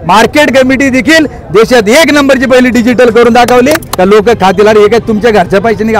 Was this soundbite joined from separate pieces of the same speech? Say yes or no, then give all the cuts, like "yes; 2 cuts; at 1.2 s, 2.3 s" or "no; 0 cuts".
yes; 1 cut; at 3.9 s